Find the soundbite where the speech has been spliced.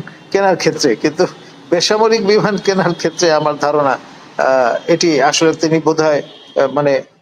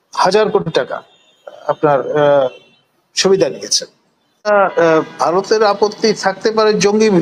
second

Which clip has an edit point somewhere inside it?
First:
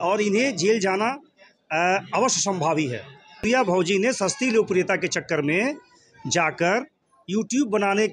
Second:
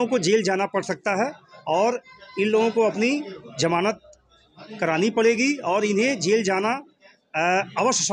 first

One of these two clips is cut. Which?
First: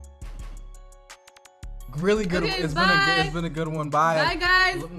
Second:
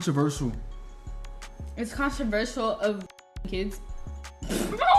first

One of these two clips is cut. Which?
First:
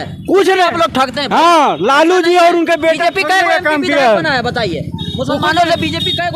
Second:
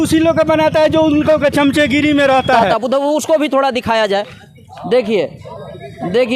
second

